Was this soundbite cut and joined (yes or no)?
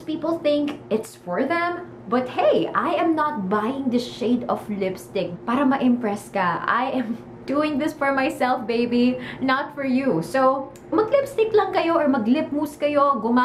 yes